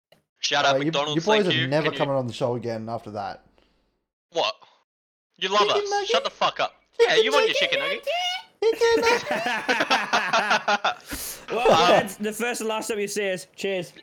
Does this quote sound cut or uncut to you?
uncut